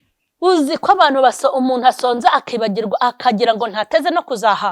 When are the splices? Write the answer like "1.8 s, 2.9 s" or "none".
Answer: none